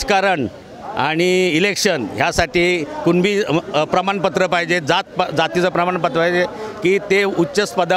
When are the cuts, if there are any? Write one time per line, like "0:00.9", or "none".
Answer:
none